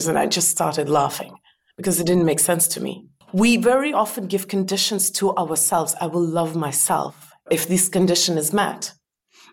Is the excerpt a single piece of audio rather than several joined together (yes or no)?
no